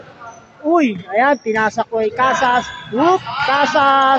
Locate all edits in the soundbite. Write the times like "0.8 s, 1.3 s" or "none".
none